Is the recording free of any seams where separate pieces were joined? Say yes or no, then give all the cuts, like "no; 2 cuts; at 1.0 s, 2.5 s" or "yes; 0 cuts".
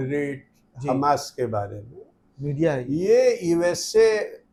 yes; 0 cuts